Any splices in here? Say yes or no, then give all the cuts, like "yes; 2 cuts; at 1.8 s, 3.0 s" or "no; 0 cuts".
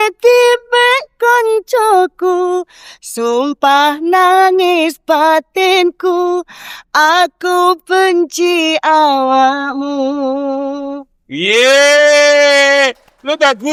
no; 0 cuts